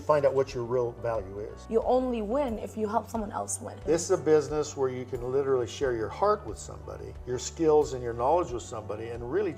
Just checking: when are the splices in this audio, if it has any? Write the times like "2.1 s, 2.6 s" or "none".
1.6 s, 3.7 s